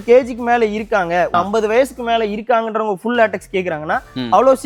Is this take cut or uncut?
cut